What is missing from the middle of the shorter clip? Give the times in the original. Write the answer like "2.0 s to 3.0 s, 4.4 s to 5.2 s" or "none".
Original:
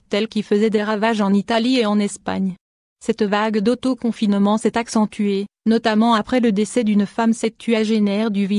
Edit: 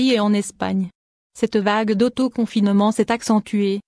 none